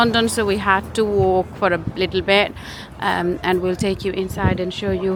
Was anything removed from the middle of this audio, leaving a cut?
no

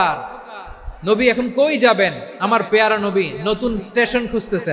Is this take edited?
no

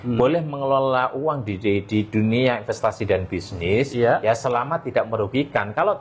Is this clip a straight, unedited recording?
yes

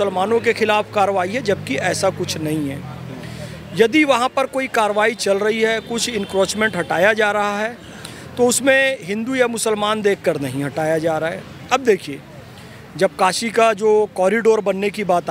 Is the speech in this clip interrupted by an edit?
no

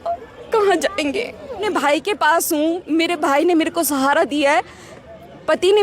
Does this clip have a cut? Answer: yes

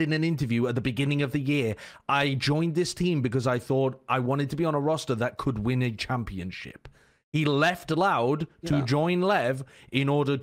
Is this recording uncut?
yes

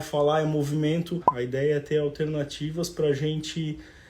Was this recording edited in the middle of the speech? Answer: yes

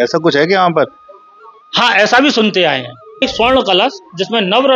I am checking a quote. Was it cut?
yes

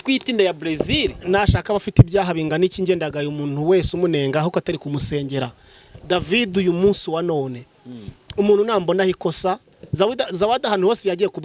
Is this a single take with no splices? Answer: yes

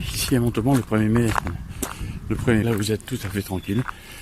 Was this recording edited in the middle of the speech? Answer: yes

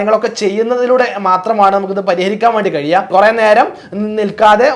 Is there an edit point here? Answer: yes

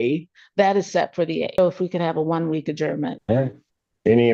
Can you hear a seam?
yes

